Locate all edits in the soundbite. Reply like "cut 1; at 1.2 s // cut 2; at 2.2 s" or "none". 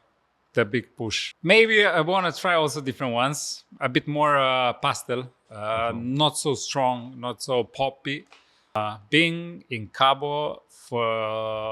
cut 1; at 1.2 s // cut 2; at 8.6 s